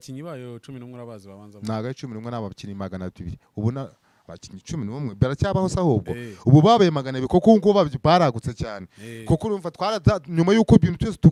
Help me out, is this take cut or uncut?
uncut